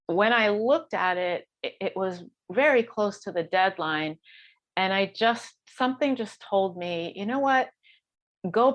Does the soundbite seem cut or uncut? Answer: uncut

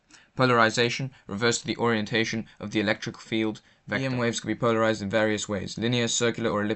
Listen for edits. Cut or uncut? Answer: cut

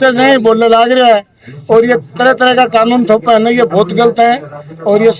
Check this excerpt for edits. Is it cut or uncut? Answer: uncut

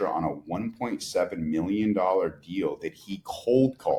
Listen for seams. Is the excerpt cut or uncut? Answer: uncut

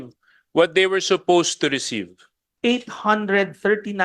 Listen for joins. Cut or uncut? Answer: cut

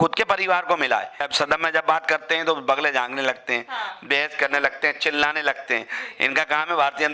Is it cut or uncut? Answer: cut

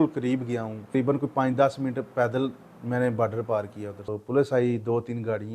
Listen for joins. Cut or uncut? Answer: cut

